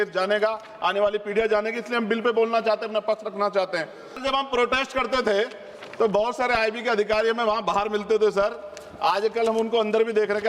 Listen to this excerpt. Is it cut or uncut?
cut